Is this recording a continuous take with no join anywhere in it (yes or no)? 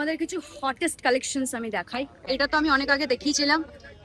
no